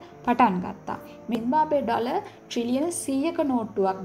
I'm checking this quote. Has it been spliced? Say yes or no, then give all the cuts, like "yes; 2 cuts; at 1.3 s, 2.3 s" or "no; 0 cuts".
yes; 1 cut; at 1.2 s